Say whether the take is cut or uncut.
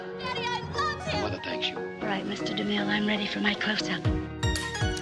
uncut